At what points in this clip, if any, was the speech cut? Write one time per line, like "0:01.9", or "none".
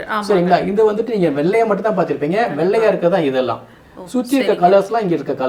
none